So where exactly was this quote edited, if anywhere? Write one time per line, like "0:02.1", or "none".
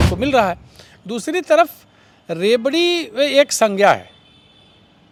none